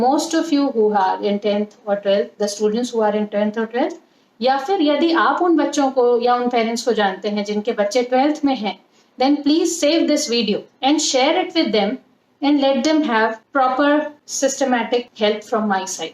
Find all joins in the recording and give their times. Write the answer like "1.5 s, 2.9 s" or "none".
10.7 s, 13.4 s, 14.2 s, 15.1 s